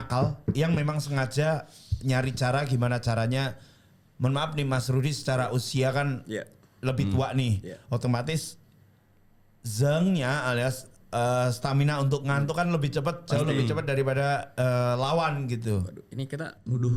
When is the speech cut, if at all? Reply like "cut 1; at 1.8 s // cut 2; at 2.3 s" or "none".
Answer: none